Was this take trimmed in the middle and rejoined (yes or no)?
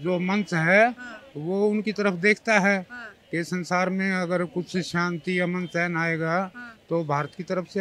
no